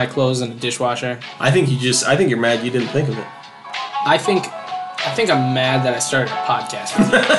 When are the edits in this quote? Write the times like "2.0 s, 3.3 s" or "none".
none